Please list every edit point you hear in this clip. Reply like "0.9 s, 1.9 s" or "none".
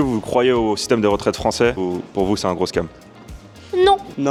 none